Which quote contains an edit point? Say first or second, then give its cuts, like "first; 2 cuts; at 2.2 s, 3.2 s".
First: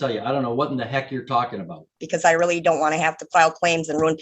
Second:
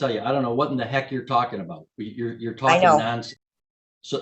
first; 1 cut; at 2.0 s